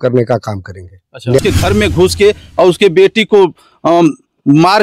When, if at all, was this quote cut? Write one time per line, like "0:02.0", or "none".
0:01.4